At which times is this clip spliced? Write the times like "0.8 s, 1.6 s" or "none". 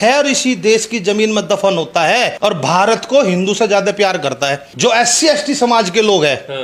2.3 s, 4.7 s